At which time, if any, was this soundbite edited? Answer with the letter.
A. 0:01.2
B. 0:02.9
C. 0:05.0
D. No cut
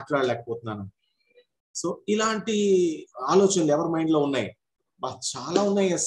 D